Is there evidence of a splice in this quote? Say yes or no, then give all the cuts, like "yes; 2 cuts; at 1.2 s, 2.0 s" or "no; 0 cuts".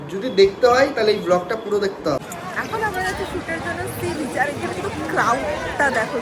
yes; 1 cut; at 2.2 s